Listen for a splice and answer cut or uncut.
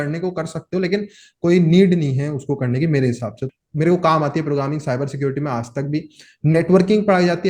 cut